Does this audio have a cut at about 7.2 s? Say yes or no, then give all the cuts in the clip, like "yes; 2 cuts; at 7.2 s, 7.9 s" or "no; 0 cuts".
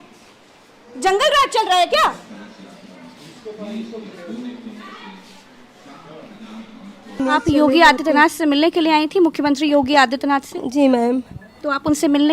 yes; 1 cut; at 7.2 s